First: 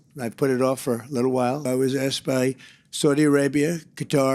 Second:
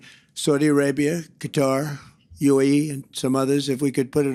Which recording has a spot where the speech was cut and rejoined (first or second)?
first